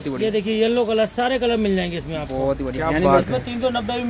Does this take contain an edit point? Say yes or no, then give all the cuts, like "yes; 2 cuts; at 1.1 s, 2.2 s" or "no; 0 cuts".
yes; 1 cut; at 3.0 s